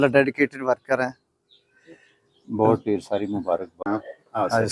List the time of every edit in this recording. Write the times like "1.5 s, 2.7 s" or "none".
3.7 s